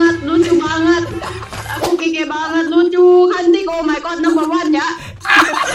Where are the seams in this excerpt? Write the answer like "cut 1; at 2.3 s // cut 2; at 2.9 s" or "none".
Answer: none